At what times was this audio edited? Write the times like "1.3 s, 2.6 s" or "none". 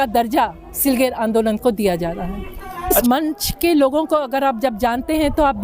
3.0 s